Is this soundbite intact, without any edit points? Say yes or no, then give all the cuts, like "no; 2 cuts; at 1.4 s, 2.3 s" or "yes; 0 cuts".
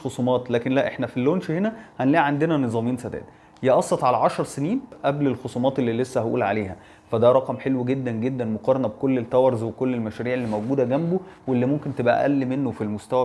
no; 1 cut; at 4.9 s